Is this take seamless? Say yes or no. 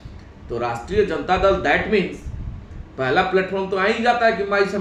yes